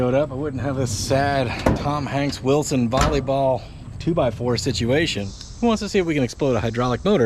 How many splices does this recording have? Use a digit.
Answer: 1